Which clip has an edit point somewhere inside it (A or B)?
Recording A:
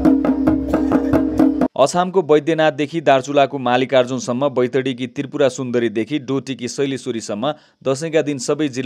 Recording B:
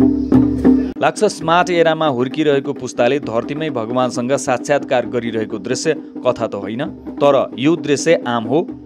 B